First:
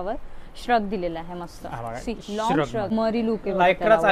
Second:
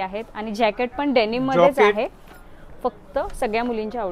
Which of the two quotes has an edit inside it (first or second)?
first